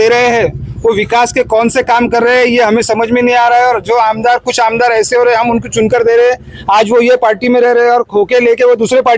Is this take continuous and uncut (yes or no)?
yes